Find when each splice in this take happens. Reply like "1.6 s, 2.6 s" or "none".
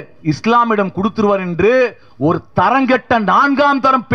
none

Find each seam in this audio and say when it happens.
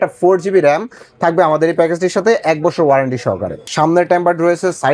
3.7 s

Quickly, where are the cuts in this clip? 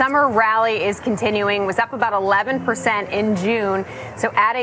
none

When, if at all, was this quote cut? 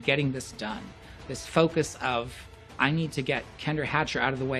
2.6 s

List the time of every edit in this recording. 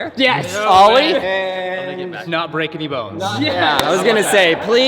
1.2 s, 2.3 s

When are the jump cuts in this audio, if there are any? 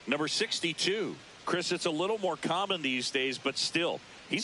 1.3 s

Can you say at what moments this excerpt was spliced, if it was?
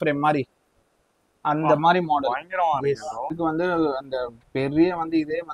3.4 s

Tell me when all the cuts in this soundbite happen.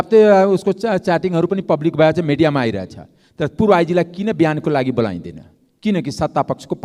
none

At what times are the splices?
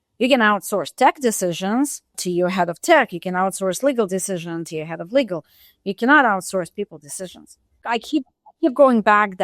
2.2 s, 7.9 s

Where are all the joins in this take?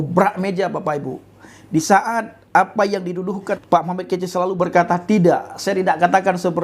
3.5 s

